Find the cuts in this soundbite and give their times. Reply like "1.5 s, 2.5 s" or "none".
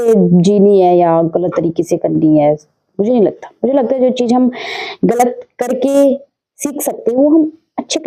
none